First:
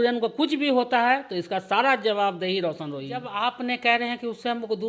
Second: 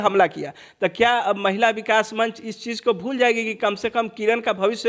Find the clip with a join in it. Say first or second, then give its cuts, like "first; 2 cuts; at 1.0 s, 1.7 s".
first; 1 cut; at 3.3 s